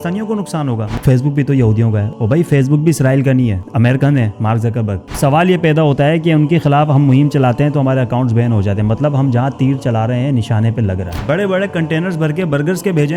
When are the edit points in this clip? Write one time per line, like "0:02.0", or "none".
0:01.0
0:05.1
0:11.2